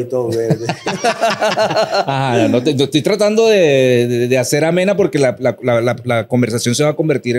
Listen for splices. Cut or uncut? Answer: uncut